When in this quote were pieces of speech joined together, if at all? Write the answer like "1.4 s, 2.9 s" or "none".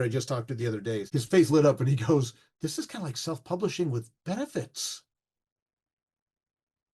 1.0 s, 2.4 s